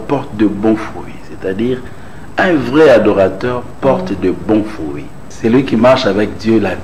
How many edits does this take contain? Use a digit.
1